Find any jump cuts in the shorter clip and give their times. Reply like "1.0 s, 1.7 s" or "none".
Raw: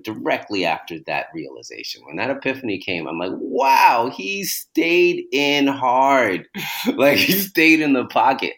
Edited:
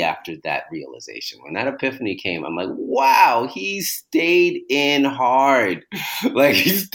none